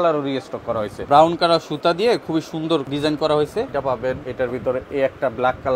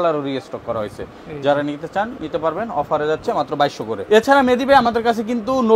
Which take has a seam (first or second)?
first